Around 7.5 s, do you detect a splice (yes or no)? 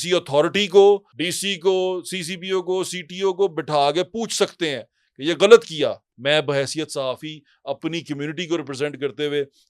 no